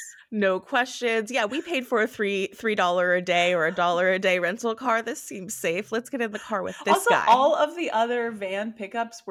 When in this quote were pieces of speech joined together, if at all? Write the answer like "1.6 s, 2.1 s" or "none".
none